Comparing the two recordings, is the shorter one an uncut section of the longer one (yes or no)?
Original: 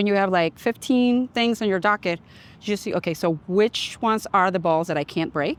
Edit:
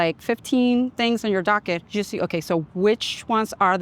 no